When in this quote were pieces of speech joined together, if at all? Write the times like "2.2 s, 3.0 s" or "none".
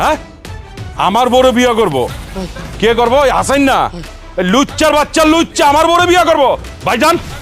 2.3 s